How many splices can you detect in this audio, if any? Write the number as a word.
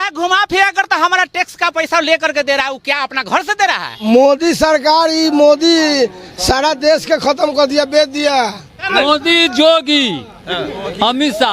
two